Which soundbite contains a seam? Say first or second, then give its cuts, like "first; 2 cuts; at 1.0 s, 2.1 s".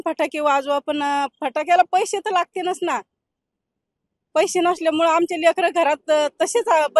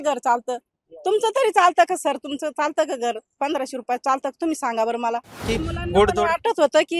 second; 1 cut; at 5.4 s